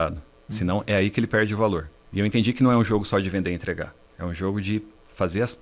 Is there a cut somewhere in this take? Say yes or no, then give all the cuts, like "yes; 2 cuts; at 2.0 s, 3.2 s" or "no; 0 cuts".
yes; 2 cuts; at 2.0 s, 4.0 s